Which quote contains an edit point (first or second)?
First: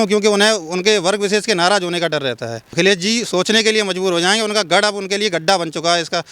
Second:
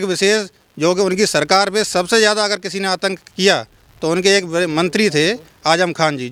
first